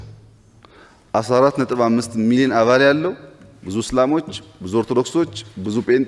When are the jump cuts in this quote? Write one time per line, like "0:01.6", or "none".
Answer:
none